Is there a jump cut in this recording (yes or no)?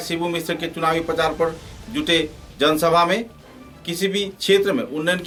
no